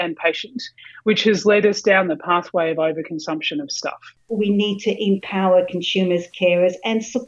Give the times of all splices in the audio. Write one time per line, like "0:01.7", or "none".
0:04.1